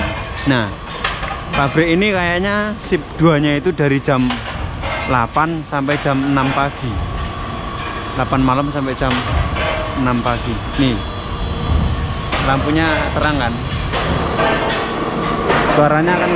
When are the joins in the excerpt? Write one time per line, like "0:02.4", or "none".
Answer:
none